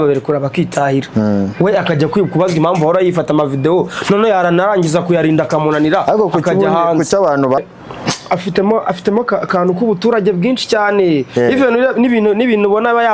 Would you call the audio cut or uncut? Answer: cut